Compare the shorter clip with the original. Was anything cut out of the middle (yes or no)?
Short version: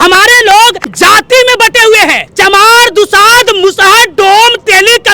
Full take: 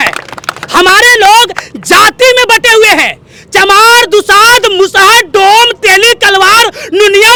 yes